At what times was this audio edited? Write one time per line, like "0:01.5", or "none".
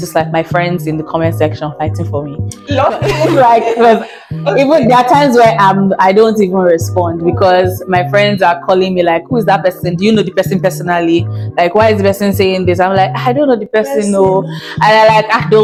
none